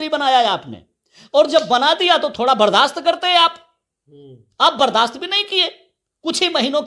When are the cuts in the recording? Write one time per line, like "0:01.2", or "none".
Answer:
none